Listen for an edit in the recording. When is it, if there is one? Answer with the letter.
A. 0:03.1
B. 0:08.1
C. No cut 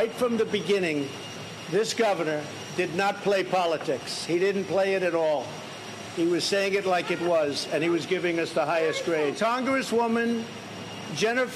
B